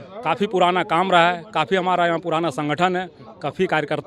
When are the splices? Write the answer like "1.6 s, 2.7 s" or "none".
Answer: none